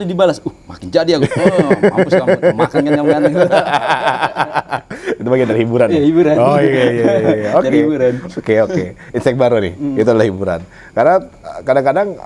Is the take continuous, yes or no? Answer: yes